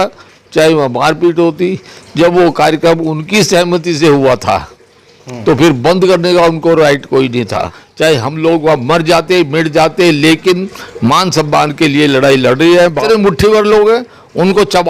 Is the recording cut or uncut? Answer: cut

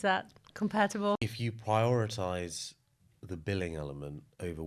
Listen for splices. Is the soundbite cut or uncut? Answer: cut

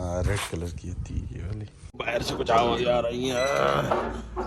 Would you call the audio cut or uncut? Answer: cut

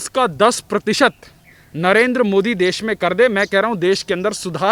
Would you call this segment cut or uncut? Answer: uncut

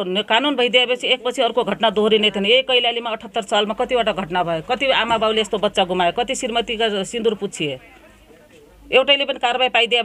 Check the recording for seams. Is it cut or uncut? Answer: uncut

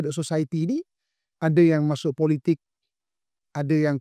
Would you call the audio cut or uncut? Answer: uncut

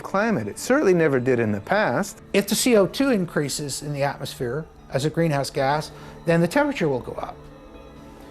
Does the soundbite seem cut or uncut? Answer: cut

